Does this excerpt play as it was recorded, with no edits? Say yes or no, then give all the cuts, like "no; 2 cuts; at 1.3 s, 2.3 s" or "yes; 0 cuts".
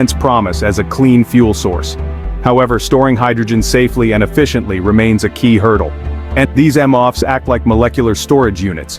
no; 1 cut; at 6.5 s